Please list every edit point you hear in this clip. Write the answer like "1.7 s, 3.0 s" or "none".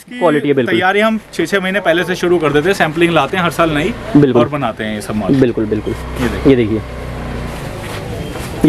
none